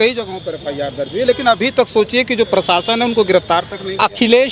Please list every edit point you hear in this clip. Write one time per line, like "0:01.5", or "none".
none